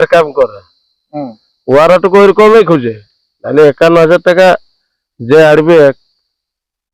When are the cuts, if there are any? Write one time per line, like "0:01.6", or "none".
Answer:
none